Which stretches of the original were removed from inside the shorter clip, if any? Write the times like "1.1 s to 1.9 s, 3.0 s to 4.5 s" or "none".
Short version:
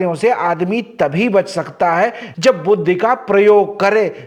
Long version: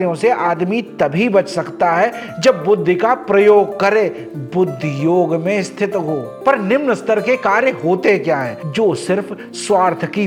none